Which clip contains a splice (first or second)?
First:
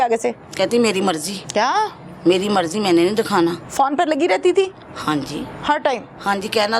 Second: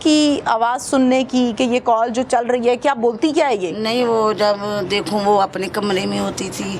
first